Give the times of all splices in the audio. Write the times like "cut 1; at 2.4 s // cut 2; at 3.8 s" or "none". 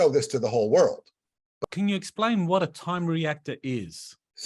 cut 1; at 1.6 s